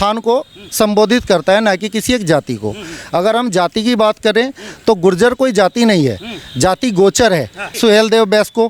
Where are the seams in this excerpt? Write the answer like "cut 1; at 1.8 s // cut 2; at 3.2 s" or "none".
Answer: cut 1; at 7.7 s